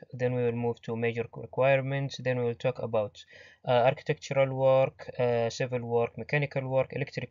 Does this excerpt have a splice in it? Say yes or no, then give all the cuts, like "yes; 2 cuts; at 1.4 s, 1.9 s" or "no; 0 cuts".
no; 0 cuts